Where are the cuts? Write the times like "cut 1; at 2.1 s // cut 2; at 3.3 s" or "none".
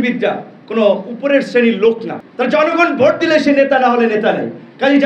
cut 1; at 1.1 s